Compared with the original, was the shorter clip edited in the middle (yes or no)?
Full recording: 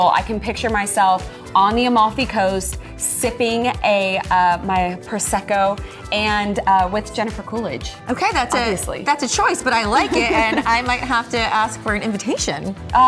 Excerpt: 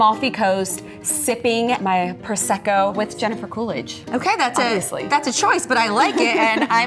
yes